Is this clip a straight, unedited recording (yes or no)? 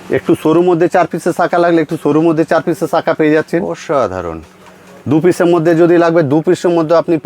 yes